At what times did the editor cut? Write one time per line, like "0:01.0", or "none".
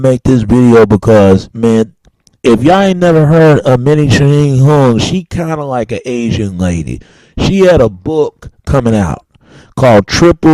0:01.0